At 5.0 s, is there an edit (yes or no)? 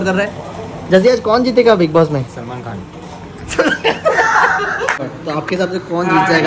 yes